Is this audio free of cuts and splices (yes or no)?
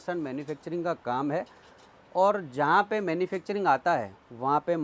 yes